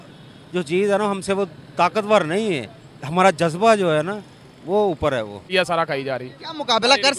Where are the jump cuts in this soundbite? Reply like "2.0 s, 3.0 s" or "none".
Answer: 5.5 s